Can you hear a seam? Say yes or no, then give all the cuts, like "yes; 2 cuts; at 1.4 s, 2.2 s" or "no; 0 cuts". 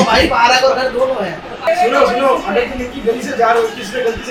no; 0 cuts